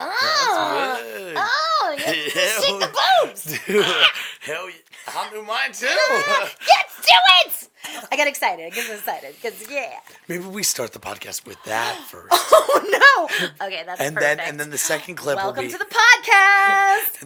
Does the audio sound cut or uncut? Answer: uncut